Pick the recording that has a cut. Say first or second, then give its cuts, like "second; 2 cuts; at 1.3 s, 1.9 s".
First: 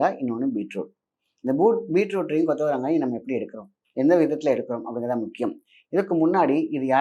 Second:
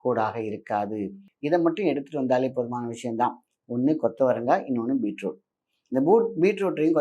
second; 1 cut; at 1.2 s